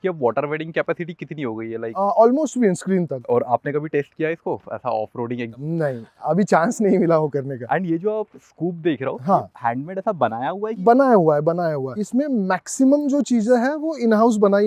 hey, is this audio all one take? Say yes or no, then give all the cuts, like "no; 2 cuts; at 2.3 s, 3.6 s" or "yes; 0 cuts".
yes; 0 cuts